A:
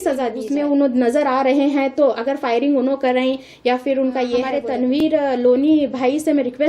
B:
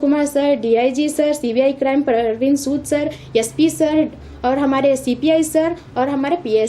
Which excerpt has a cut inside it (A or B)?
A